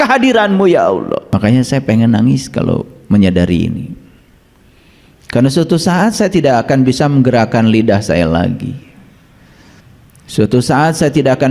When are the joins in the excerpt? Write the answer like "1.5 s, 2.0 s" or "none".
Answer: 1.2 s